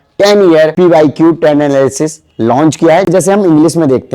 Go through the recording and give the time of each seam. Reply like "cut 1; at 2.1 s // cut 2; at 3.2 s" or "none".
cut 1; at 3.1 s